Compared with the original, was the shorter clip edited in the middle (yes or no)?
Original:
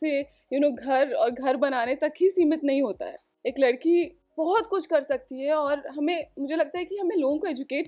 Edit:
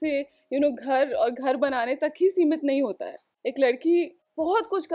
no